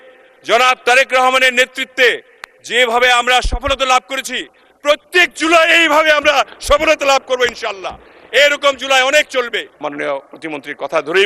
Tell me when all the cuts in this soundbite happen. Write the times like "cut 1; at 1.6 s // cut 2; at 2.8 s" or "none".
cut 1; at 9.8 s